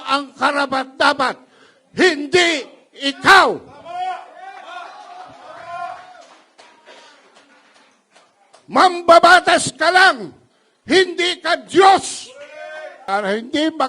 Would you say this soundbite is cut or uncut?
cut